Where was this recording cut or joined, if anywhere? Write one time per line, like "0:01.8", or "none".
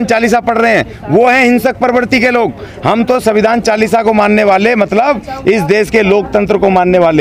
none